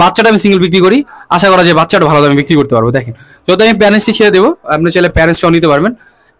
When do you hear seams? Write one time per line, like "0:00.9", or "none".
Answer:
none